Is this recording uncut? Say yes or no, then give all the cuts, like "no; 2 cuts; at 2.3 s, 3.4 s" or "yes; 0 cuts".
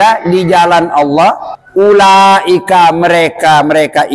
no; 1 cut; at 1.5 s